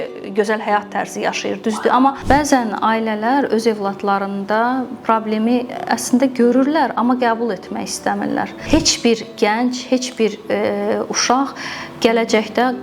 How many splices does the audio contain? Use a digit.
2